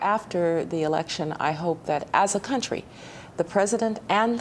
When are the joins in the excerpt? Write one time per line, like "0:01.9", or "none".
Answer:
none